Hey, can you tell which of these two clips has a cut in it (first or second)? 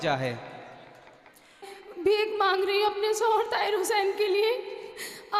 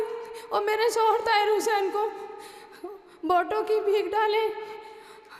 first